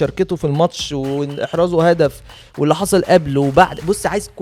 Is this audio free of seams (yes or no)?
yes